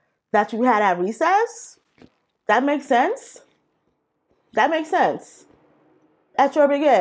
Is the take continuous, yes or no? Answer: yes